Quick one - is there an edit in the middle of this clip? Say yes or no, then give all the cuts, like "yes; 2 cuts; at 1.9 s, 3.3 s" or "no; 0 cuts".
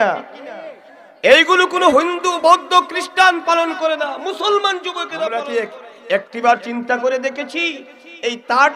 yes; 1 cut; at 5.2 s